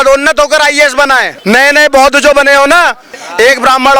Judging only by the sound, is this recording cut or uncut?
cut